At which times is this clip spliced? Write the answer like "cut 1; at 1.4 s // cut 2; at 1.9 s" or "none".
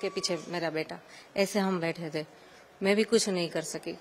none